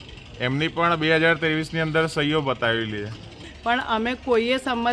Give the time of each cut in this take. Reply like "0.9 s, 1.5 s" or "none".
3.4 s